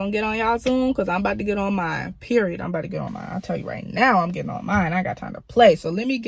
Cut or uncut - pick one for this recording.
uncut